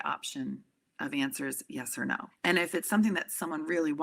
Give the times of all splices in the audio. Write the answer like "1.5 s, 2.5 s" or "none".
2.3 s